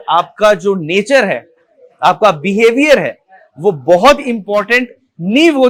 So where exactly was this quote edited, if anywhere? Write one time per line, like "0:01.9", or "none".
none